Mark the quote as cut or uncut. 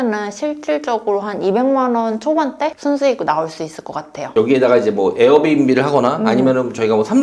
cut